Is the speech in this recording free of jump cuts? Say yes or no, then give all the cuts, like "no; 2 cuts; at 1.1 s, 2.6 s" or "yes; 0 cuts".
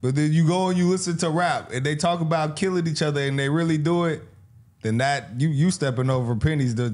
yes; 0 cuts